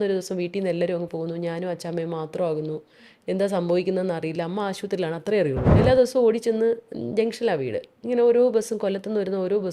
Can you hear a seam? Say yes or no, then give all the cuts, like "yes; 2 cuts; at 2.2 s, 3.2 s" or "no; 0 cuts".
yes; 1 cut; at 5.7 s